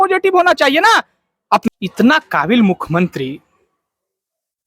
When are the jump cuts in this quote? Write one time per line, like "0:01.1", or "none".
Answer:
0:01.7